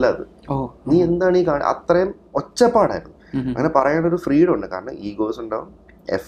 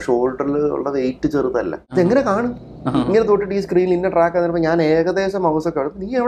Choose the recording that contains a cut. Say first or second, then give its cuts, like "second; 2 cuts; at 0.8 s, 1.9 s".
second; 1 cut; at 1.9 s